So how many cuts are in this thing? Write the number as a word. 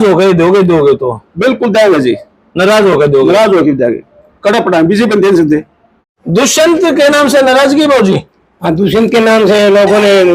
one